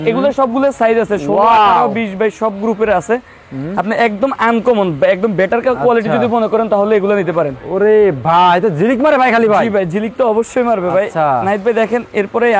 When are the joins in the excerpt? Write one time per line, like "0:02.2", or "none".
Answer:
none